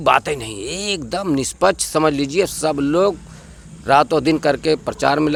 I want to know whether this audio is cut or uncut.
uncut